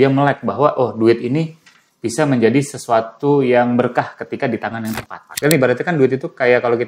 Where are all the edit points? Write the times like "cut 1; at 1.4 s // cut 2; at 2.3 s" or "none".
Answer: cut 1; at 5.3 s